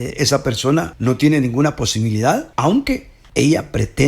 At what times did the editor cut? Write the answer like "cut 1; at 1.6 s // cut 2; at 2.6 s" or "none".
cut 1; at 0.9 s // cut 2; at 2.5 s // cut 3; at 3.2 s